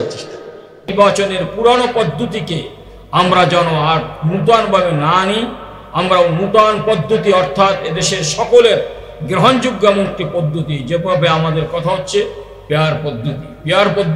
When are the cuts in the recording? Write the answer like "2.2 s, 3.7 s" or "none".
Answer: 0.9 s